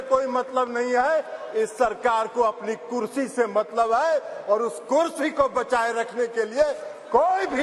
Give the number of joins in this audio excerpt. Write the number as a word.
zero